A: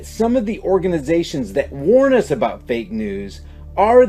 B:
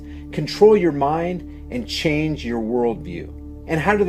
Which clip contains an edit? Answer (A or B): B